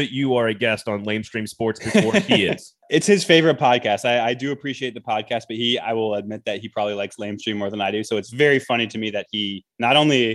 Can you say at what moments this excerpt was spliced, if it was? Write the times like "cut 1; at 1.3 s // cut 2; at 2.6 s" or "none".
cut 1; at 2.7 s